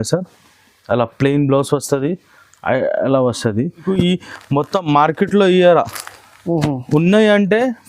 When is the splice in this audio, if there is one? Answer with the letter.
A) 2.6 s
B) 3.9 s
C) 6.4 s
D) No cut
B